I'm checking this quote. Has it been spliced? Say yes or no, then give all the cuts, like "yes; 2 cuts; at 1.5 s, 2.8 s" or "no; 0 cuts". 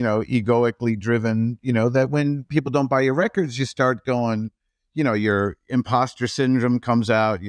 no; 0 cuts